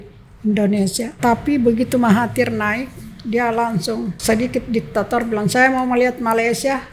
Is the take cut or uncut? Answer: cut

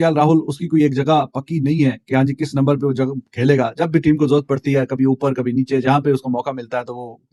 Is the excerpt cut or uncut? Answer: uncut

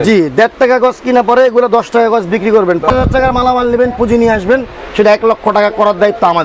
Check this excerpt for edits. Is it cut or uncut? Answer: cut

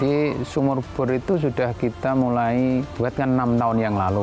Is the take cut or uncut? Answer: cut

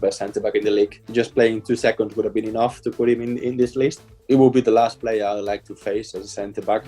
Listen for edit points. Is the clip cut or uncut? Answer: cut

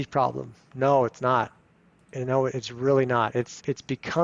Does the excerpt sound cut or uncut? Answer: uncut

